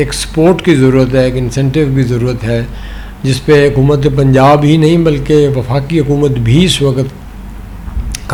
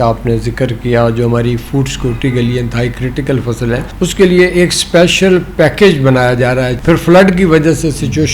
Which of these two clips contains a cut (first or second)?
second